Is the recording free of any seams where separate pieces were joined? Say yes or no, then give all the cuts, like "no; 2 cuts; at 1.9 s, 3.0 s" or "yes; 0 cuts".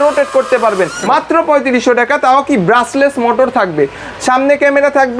no; 1 cut; at 1.0 s